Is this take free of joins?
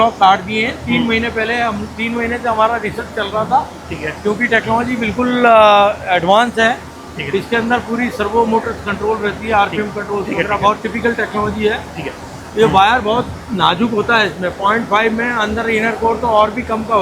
yes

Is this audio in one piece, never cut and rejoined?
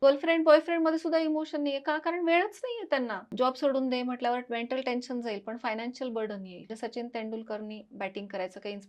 no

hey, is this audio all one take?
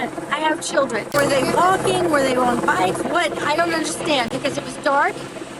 no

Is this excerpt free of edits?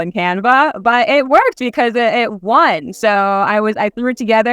yes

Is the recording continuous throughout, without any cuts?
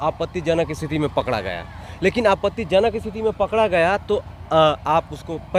yes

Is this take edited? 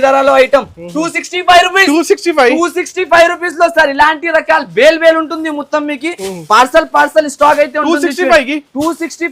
no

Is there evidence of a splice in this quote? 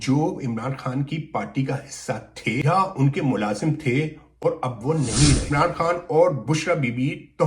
yes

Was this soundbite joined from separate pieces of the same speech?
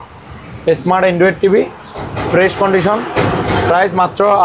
no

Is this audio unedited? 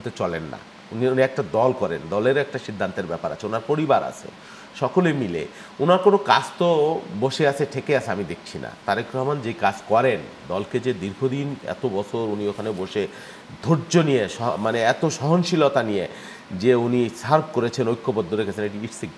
yes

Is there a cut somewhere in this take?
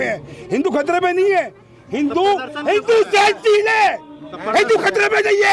no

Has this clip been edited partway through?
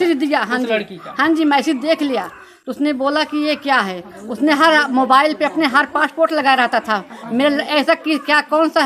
no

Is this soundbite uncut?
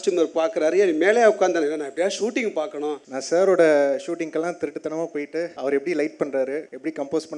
no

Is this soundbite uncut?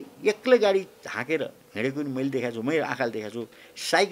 yes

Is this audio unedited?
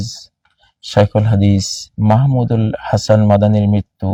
yes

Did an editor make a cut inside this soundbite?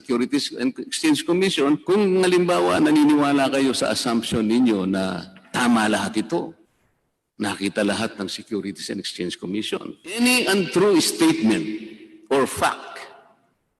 yes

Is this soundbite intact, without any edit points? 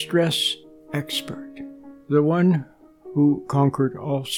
yes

